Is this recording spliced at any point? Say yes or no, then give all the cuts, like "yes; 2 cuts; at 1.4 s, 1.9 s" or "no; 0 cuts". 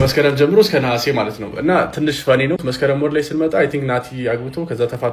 yes; 1 cut; at 2.6 s